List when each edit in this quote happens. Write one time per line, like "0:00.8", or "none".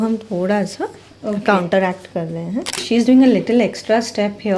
0:02.8